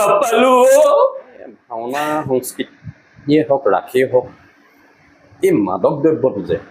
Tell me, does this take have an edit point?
yes; 1 cut; at 1.6 s

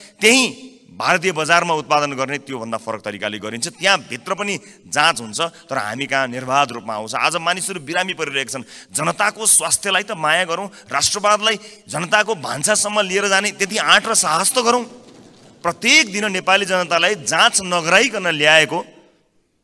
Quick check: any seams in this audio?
no; 0 cuts

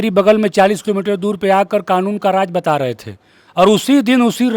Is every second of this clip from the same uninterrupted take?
yes; 0 cuts

